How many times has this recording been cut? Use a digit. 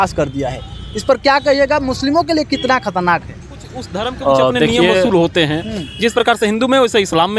1